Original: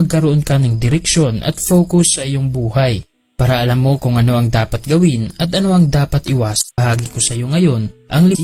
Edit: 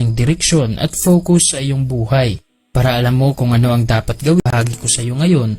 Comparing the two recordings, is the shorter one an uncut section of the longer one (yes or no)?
no